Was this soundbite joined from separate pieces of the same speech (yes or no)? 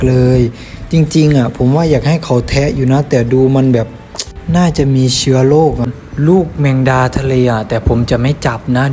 yes